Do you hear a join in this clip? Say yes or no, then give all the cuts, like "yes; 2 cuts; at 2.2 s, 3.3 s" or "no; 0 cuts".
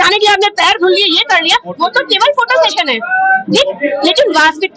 no; 0 cuts